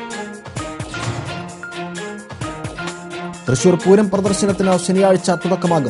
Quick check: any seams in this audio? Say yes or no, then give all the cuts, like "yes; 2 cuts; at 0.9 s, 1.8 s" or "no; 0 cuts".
yes; 1 cut; at 0.9 s